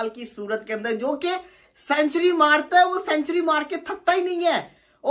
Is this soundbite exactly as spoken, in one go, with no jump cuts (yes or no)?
yes